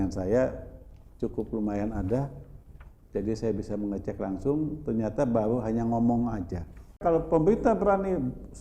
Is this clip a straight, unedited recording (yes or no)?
no